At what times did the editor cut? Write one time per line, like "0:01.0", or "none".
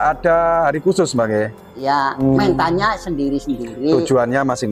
0:02.2